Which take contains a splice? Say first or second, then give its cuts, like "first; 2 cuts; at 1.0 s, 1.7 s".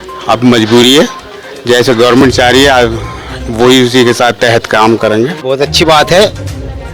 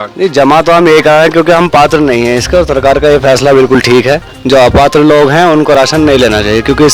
first; 1 cut; at 5.4 s